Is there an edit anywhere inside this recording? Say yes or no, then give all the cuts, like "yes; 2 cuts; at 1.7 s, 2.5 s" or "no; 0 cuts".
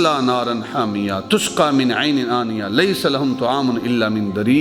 no; 0 cuts